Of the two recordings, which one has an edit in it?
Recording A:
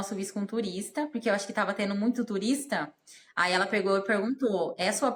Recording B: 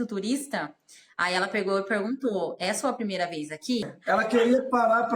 B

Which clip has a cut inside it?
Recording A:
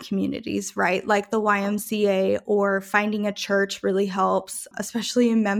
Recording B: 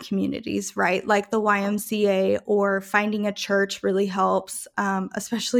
A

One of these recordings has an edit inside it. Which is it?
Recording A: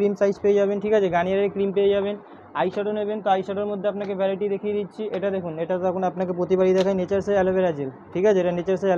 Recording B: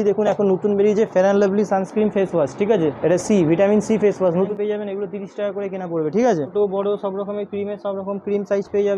B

